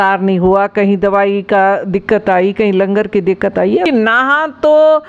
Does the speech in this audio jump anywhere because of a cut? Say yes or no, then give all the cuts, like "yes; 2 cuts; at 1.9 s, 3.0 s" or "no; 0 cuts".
yes; 1 cut; at 3.9 s